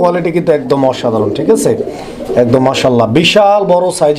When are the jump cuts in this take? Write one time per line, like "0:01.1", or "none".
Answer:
none